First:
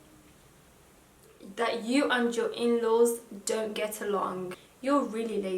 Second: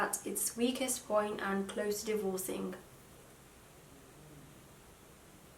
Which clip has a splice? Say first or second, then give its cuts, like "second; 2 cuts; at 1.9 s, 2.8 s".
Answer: first; 2 cuts; at 1.4 s, 4.6 s